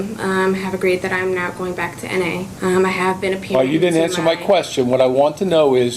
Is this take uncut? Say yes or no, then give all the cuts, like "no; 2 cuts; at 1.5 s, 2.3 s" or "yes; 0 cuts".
no; 1 cut; at 2.5 s